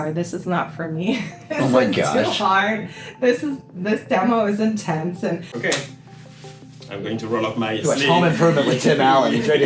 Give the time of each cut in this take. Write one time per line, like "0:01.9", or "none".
0:05.5